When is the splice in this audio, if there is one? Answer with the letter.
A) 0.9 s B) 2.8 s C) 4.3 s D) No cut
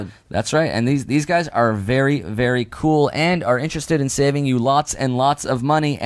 D